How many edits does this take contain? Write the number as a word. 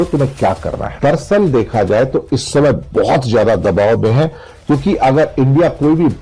one